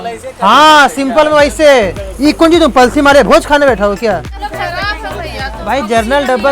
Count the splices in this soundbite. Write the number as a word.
one